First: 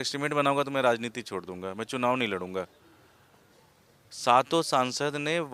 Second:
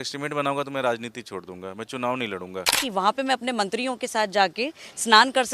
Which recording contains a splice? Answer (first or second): second